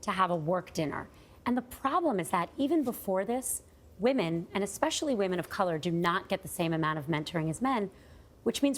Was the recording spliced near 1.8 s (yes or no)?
yes